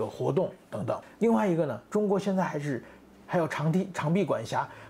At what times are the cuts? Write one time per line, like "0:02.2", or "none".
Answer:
0:01.1